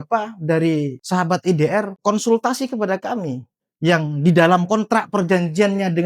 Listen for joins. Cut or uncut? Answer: cut